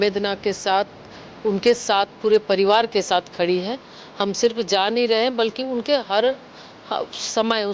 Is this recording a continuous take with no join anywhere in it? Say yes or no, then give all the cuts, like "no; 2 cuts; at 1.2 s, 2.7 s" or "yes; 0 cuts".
yes; 0 cuts